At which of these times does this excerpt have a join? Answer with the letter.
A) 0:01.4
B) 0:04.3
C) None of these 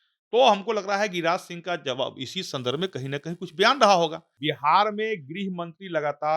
B